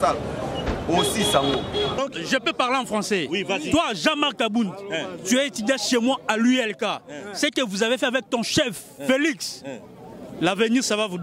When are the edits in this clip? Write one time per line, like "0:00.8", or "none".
0:02.0